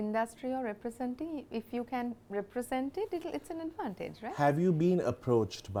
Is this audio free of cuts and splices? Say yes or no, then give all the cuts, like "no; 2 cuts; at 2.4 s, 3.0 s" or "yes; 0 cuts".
yes; 0 cuts